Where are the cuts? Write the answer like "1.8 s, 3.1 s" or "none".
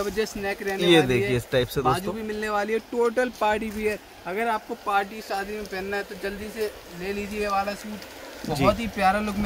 none